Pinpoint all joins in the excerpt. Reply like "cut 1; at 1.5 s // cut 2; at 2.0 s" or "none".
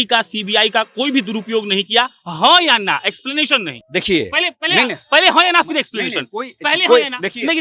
none